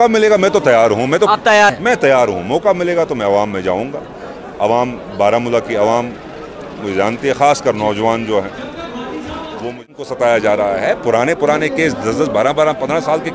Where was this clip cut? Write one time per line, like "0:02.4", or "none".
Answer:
0:01.7
0:09.8